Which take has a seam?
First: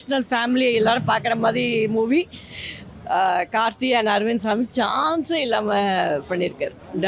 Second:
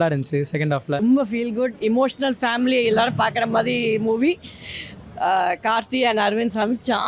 second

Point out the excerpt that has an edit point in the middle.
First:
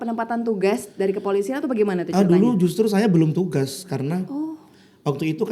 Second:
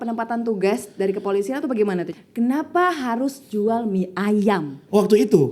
second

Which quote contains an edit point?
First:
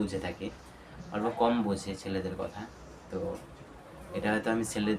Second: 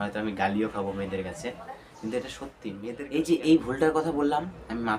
second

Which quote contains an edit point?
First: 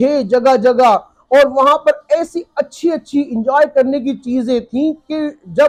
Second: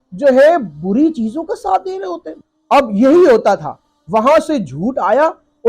second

